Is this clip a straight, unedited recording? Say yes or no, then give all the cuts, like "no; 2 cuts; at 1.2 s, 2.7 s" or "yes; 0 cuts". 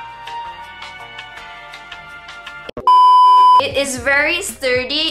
yes; 0 cuts